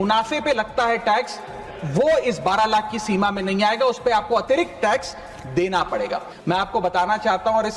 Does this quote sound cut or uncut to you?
cut